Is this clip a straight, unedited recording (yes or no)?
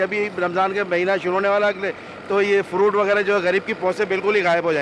yes